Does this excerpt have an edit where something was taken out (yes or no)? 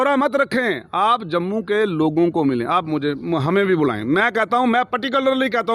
no